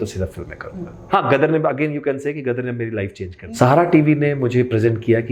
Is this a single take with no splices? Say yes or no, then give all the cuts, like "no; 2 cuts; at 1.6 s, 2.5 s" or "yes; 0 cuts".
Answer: no; 2 cuts; at 1.1 s, 3.4 s